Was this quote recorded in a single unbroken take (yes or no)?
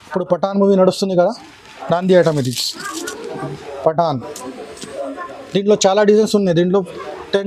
yes